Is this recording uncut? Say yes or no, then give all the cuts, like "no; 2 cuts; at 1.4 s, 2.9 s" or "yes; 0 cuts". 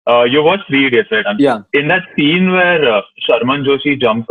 no; 1 cut; at 1.3 s